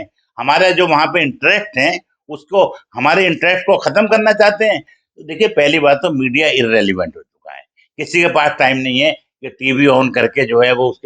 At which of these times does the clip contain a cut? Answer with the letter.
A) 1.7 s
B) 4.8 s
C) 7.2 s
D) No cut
B